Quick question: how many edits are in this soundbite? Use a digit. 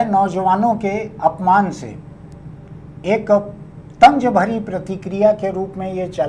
0